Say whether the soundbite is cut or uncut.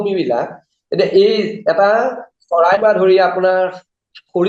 uncut